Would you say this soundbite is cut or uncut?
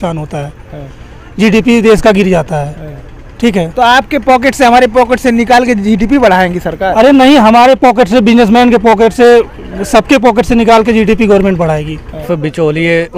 cut